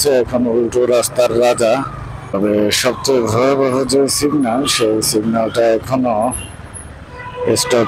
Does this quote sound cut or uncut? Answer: cut